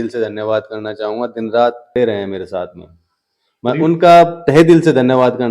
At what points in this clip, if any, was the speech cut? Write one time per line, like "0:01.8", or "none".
0:01.9

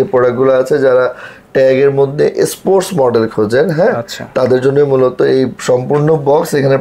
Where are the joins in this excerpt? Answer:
none

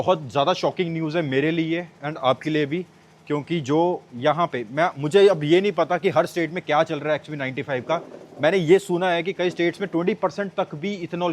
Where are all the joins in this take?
none

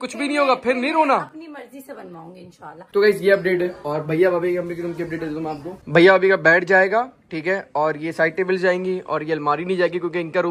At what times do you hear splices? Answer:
none

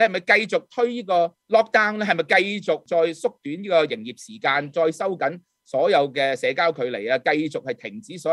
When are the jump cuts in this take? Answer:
0:01.4
0:02.8

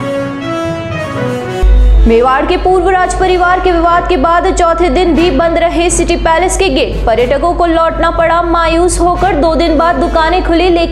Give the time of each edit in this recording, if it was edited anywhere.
0:01.6

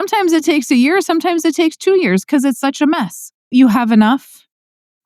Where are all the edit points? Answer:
0:03.5

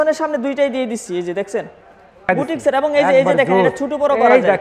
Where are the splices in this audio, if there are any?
0:02.3

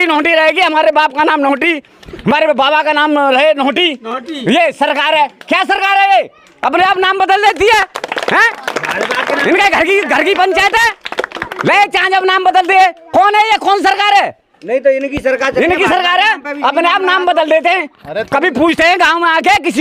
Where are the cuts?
none

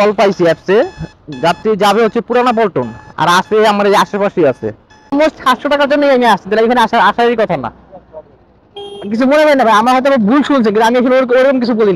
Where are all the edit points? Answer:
0:05.1

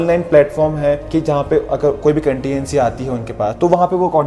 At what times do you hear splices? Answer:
none

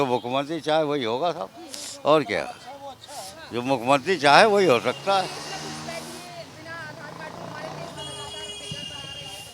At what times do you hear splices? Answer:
none

